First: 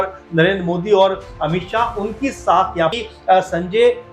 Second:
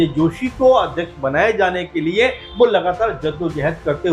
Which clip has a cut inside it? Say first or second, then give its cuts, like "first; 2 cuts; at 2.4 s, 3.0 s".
first; 1 cut; at 2.9 s